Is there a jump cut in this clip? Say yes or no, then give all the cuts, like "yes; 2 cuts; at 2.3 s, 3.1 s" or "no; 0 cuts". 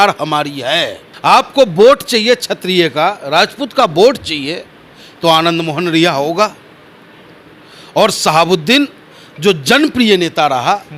yes; 1 cut; at 1.0 s